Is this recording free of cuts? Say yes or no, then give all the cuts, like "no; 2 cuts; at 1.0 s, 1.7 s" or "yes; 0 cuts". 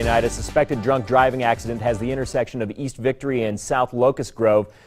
yes; 0 cuts